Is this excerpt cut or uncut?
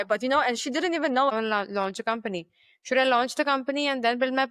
cut